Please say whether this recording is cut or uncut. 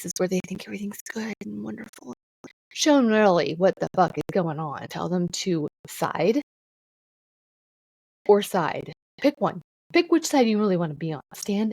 cut